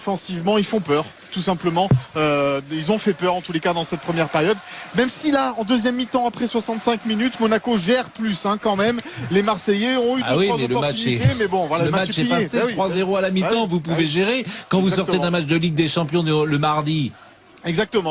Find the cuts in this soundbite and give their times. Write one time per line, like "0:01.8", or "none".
0:03.2